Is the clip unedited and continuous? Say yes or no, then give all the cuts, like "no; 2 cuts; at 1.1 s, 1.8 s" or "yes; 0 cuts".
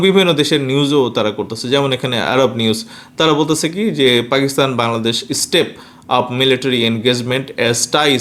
yes; 0 cuts